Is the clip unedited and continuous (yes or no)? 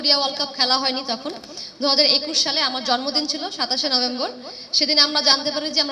yes